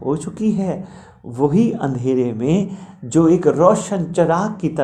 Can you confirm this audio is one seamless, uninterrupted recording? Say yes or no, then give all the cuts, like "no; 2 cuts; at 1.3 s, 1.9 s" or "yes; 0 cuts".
yes; 0 cuts